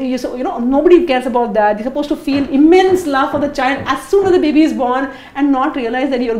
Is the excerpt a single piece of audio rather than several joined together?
yes; 0 cuts

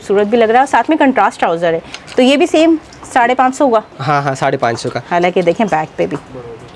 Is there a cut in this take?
no; 0 cuts

